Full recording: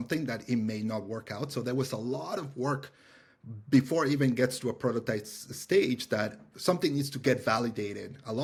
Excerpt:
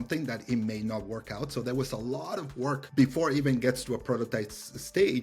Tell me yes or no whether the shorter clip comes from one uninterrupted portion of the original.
no